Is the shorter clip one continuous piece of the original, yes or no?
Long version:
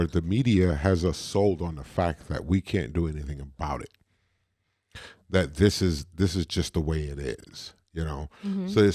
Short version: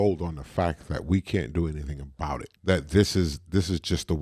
no